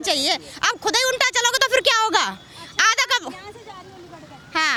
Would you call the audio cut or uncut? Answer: uncut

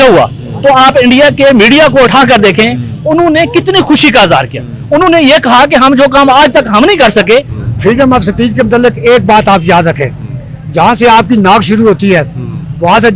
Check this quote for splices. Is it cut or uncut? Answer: cut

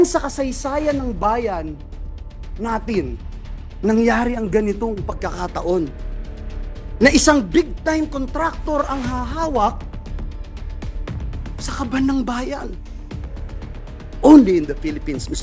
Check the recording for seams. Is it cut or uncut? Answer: uncut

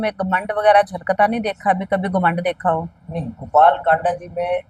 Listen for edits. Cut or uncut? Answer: uncut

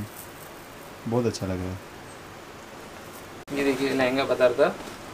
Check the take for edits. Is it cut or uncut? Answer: uncut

